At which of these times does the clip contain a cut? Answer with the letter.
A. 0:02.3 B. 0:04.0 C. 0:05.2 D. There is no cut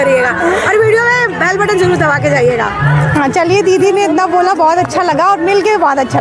D